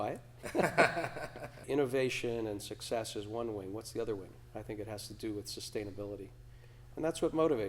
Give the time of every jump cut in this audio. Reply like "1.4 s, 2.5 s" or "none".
1.6 s